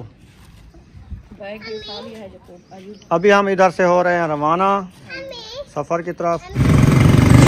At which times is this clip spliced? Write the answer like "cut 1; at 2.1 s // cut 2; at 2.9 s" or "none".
cut 1; at 6.5 s